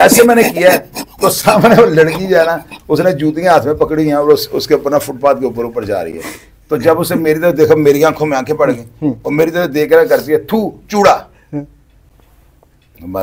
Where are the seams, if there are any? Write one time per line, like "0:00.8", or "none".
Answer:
none